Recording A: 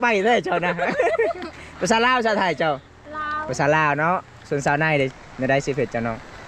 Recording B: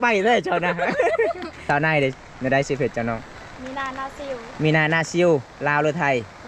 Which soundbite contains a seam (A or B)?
B